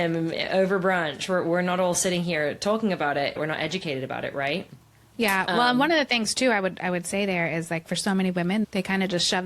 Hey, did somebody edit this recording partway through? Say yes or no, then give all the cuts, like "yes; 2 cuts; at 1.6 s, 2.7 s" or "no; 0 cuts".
yes; 2 cuts; at 3.3 s, 8.7 s